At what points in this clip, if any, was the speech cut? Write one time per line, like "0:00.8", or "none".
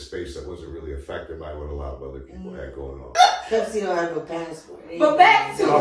0:03.1